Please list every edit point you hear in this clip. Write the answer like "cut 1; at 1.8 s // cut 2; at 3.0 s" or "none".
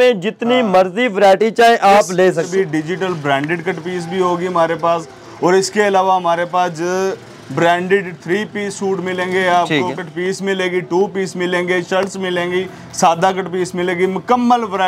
cut 1; at 2.5 s